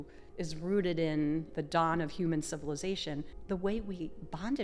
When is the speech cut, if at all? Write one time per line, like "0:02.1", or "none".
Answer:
0:01.5
0:03.3